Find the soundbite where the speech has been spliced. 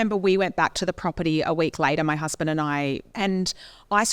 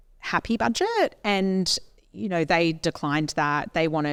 first; 1 cut; at 3.1 s

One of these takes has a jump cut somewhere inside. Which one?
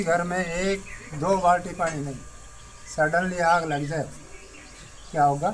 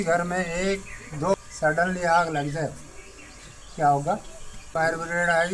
second; 2 cuts; at 1.4 s, 4.6 s

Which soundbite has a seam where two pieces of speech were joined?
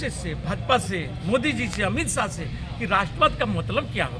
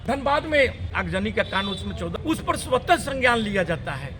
second; 2 cuts; at 0.9 s, 2.1 s

